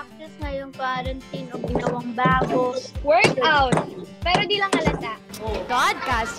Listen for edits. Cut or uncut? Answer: cut